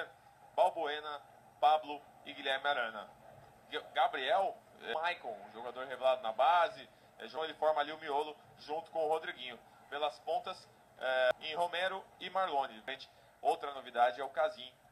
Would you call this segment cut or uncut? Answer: cut